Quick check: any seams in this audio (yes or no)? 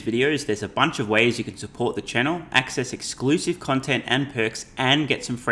no